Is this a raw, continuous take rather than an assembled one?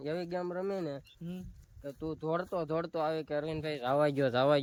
yes; 0 cuts

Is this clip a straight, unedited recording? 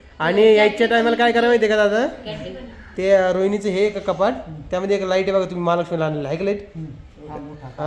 yes; 0 cuts

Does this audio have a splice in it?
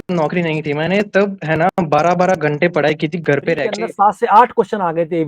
yes; 1 cut; at 3.7 s

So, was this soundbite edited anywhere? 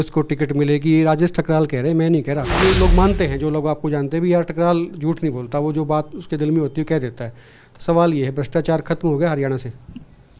yes; 1 cut; at 2.5 s

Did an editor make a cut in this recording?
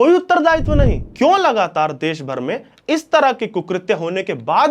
yes; 1 cut; at 1.0 s

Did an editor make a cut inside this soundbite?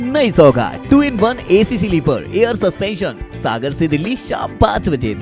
no; 0 cuts

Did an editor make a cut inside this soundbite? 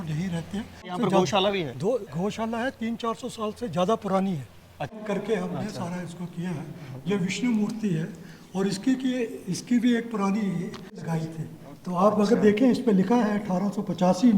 yes; 3 cuts; at 0.9 s, 5.0 s, 11.0 s

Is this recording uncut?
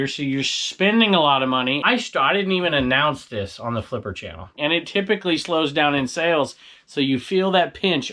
no; 2 cuts; at 1.8 s, 4.6 s

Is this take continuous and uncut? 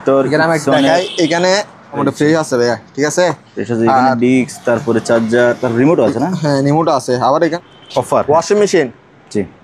no; 2 cuts; at 2.0 s, 7.5 s

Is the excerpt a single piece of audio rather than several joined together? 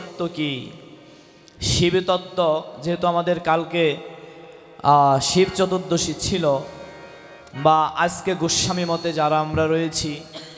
yes; 0 cuts

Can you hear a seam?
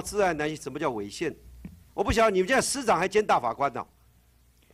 no; 0 cuts

